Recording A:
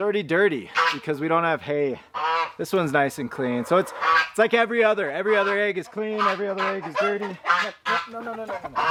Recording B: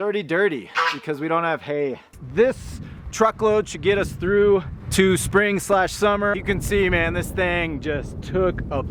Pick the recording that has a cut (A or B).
B